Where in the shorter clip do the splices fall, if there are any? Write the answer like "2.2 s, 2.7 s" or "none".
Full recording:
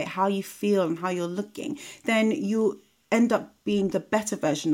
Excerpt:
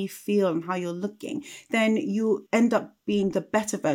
2.4 s